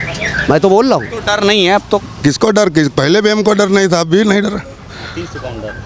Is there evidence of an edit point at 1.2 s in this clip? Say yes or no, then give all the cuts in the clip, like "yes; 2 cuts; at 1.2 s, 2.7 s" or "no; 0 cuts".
yes; 1 cut; at 1.2 s